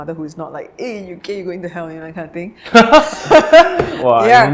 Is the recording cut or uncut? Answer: uncut